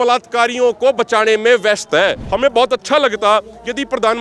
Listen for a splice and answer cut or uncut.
cut